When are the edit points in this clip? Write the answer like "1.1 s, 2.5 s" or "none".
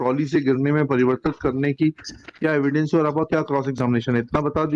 none

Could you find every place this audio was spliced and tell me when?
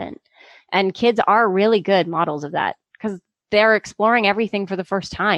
none

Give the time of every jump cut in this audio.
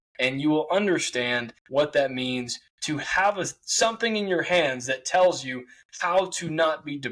1.5 s

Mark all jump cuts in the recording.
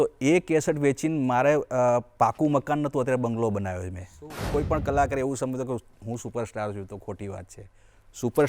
4.4 s

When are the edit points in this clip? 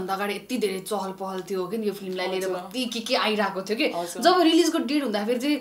none

